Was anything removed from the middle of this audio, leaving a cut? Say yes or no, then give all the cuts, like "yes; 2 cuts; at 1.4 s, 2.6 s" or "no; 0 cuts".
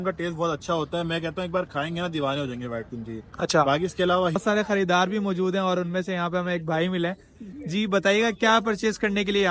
yes; 1 cut; at 4.4 s